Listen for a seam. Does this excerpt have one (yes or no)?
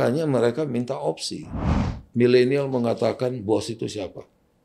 yes